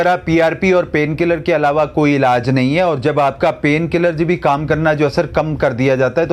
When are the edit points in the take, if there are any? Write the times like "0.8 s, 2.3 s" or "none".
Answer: none